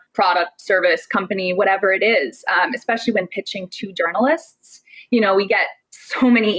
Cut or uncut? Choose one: uncut